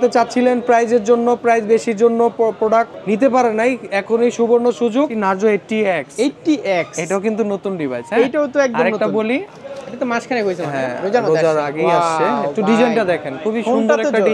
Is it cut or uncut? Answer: cut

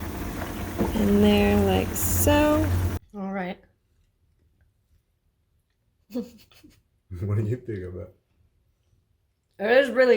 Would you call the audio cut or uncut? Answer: cut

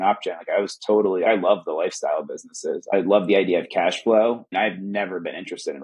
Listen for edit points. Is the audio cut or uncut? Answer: cut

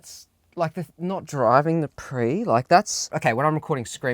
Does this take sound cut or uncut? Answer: cut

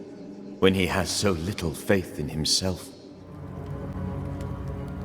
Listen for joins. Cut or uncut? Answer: cut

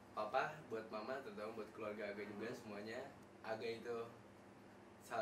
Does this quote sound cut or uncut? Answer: cut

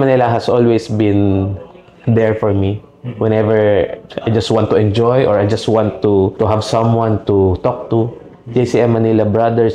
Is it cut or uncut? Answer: uncut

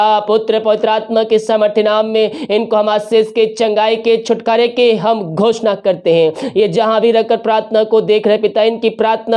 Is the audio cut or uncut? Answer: uncut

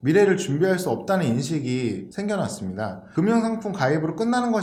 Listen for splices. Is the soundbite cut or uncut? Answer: uncut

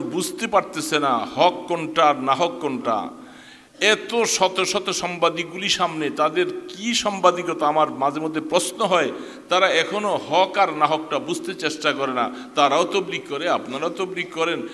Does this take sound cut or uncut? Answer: uncut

